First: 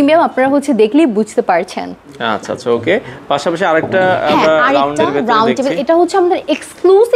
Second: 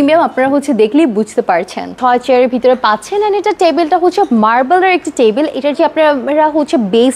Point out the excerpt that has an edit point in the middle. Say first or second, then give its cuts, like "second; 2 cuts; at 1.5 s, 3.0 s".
second; 1 cut; at 2.0 s